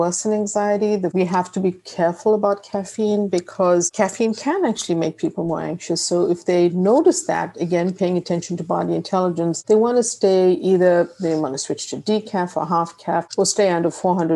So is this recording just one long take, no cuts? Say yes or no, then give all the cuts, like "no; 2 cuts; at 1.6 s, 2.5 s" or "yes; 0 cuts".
no; 1 cut; at 1.1 s